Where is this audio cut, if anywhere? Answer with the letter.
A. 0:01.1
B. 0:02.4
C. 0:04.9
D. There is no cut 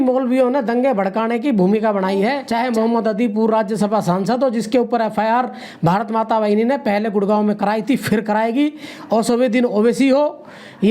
B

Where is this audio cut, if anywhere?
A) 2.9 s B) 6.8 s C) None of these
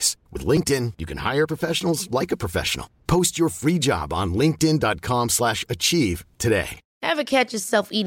B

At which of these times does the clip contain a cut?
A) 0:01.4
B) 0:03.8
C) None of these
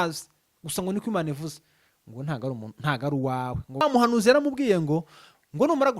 B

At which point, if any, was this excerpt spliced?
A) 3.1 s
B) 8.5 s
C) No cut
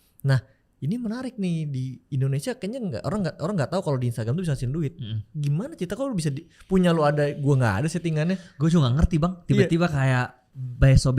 C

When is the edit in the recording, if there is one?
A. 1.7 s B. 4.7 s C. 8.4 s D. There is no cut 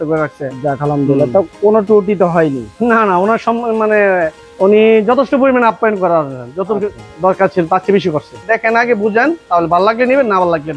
C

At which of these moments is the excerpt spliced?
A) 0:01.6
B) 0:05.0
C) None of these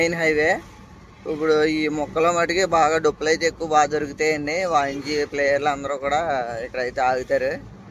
C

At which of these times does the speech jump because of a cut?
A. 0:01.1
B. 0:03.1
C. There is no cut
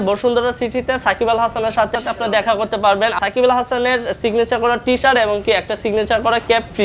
B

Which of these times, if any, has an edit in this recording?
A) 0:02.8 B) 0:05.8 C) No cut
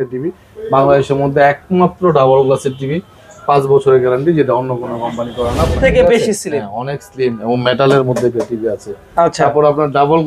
B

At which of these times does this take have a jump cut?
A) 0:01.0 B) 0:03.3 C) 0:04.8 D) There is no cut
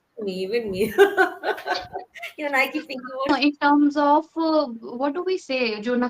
B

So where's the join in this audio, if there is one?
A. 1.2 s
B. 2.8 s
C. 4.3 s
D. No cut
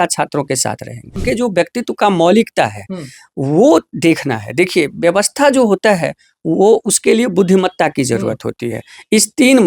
A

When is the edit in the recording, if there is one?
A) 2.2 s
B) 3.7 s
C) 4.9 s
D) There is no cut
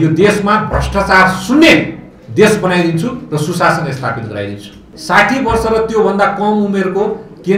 C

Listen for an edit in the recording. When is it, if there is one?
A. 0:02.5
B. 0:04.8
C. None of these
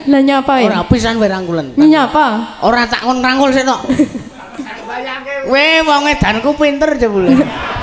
C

